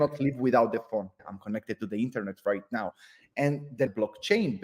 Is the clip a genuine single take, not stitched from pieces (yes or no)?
no